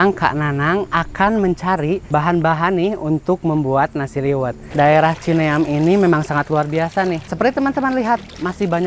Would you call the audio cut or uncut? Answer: cut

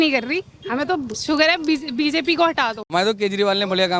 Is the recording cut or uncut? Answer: cut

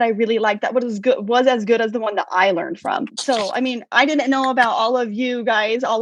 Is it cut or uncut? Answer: uncut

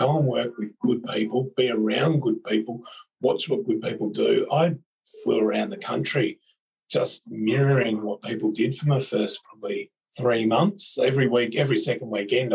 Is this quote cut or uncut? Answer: uncut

